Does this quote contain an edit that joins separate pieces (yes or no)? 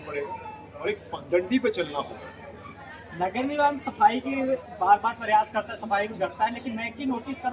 no